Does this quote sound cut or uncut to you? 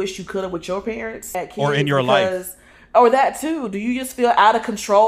cut